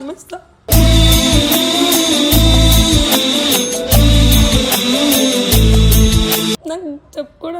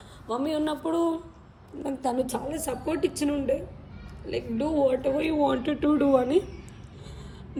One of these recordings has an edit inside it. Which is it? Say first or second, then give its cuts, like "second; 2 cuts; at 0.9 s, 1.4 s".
first; 1 cut; at 6.6 s